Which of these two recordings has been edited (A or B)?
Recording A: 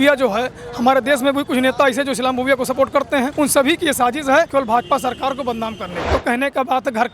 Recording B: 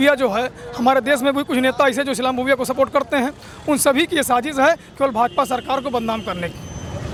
A